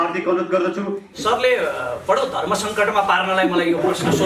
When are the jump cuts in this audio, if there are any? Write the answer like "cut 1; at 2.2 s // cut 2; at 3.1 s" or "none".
cut 1; at 1.0 s